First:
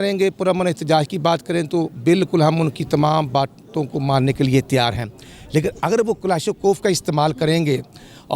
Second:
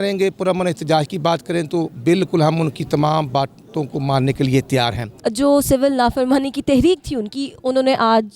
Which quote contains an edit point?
second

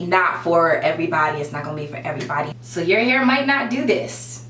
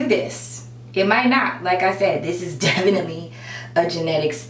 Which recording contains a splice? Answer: first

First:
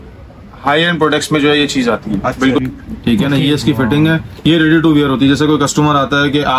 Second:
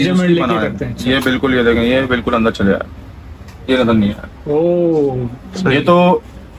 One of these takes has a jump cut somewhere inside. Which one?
first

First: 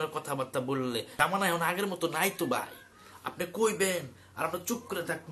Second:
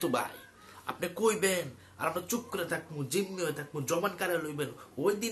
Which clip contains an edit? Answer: first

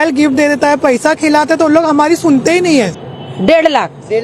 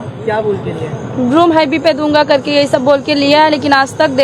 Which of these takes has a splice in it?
first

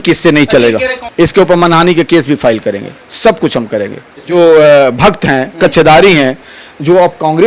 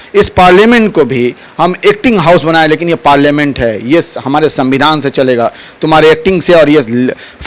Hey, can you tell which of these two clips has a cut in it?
first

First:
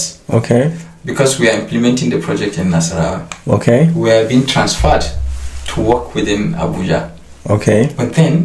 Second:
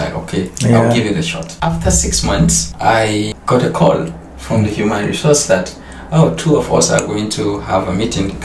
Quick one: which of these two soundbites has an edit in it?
second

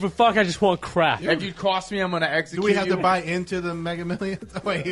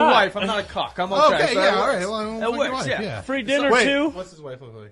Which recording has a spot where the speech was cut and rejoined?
first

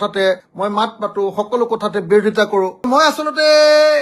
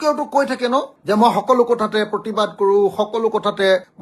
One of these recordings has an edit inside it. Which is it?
first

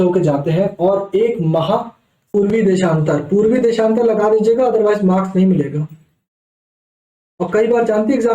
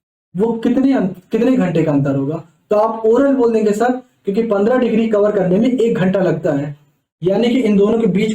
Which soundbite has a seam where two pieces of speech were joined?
first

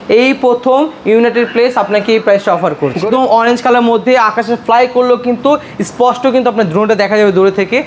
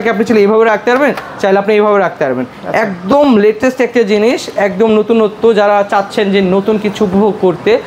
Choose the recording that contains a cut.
first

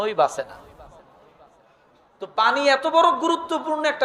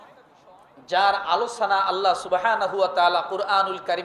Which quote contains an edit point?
first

